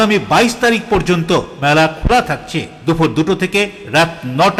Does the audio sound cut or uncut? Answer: uncut